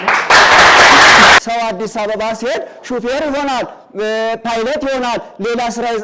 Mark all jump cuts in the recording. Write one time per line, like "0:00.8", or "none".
0:01.4